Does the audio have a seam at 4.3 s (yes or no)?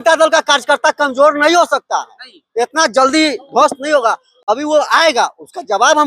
no